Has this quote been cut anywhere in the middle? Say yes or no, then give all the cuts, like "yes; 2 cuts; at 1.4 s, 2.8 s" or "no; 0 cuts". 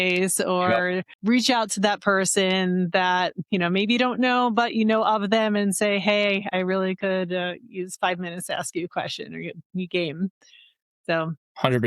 yes; 1 cut; at 1.1 s